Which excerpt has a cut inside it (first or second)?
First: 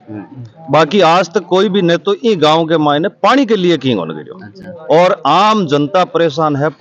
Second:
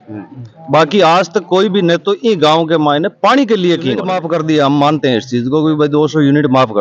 second